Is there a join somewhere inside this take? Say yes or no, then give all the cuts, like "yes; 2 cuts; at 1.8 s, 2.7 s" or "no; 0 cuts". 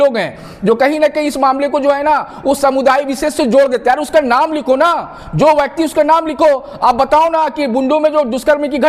no; 0 cuts